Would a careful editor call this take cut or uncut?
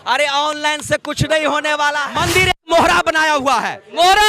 cut